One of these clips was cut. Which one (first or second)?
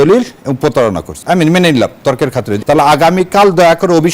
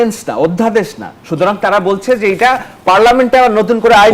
first